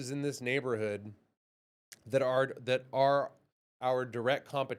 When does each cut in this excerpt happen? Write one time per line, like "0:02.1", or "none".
none